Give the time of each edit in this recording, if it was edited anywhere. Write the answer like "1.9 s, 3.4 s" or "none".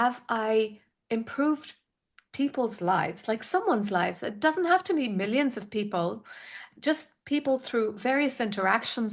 none